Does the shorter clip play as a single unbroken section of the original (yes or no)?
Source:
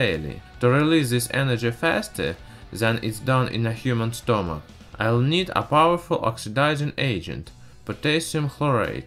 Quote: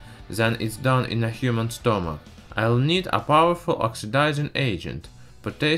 yes